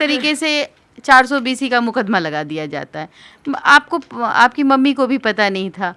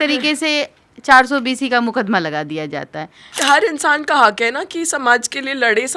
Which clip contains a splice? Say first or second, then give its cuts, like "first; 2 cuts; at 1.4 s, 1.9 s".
second; 1 cut; at 3.3 s